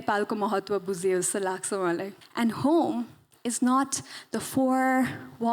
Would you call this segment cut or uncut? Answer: cut